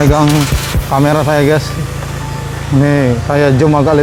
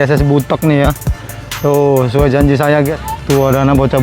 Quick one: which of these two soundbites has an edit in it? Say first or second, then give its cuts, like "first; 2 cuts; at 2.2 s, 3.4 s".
second; 1 cut; at 3.0 s